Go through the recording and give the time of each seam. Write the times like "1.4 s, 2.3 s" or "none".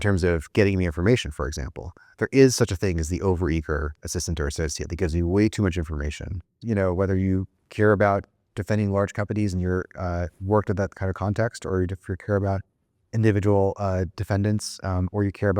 6.5 s